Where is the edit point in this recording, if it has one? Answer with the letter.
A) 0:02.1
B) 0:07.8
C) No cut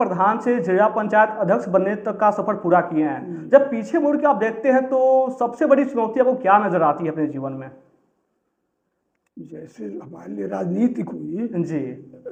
C